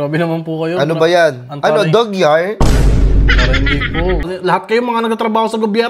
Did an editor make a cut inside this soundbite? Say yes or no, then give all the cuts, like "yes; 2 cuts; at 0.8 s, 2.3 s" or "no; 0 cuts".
yes; 1 cut; at 4.2 s